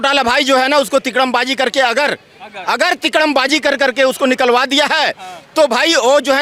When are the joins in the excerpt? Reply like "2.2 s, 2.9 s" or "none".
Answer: none

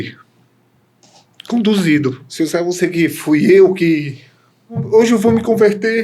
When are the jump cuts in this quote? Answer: 2.2 s, 4.8 s

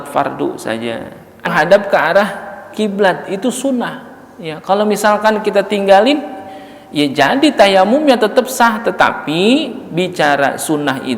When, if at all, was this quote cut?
1.5 s

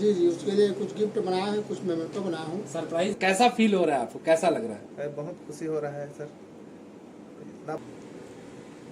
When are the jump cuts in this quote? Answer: 3.2 s, 7.8 s

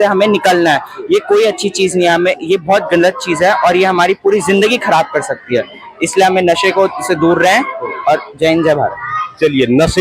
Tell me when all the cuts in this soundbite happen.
none

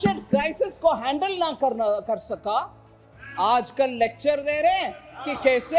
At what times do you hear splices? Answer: none

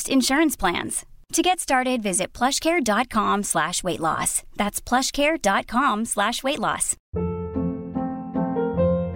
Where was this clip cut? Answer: 7.0 s

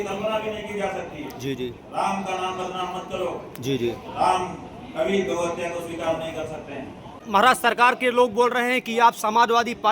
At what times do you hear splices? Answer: 7.2 s

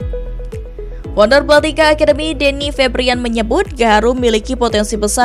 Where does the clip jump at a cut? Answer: 1.1 s

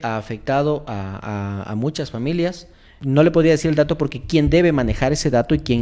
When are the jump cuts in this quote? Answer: 2.9 s

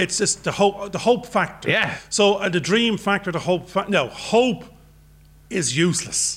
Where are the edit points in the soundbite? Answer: none

